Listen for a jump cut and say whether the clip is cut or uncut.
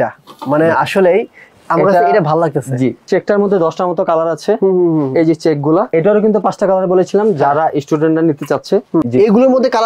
cut